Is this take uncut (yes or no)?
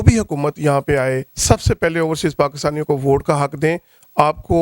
no